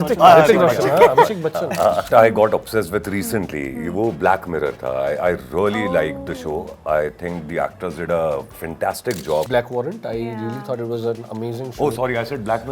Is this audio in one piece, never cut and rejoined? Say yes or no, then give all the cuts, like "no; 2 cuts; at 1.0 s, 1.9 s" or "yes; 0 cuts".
no; 2 cuts; at 2.1 s, 9.5 s